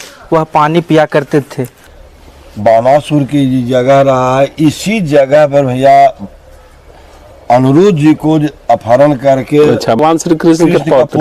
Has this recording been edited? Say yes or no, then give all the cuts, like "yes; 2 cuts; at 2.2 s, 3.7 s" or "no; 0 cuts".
yes; 2 cuts; at 1.8 s, 9.8 s